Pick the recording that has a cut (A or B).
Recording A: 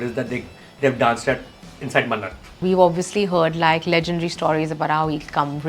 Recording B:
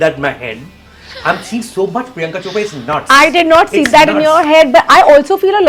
A